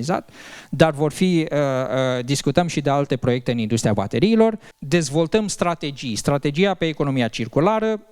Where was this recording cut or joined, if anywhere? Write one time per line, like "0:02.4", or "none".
0:04.7

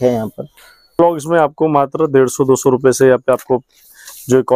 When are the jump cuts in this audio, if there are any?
0:00.9

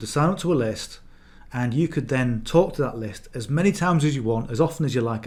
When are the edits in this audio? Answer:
none

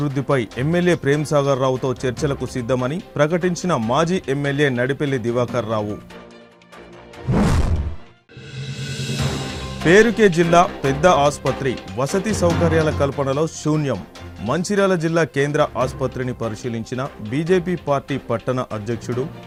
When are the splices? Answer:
none

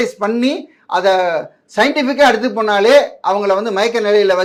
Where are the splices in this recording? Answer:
none

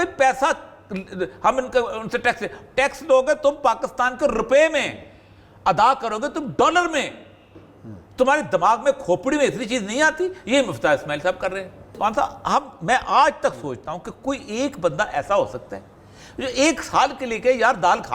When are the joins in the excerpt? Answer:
0:11.9

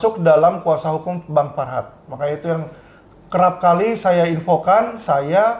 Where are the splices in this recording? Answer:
none

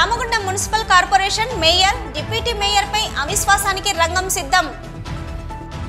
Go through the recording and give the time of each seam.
none

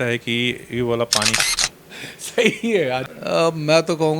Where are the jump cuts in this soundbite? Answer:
0:01.4
0:03.1

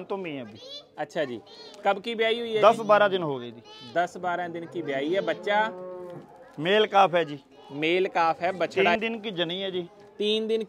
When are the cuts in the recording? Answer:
0:08.8

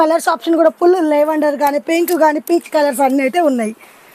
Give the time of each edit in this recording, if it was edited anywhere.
none

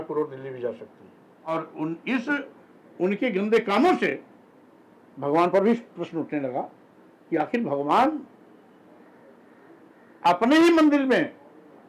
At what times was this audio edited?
0:01.3

